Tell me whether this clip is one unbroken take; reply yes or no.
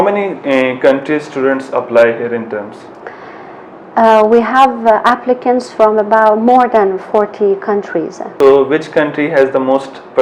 yes